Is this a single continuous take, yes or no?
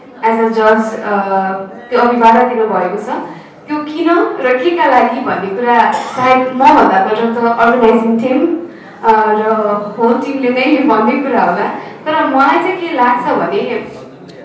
yes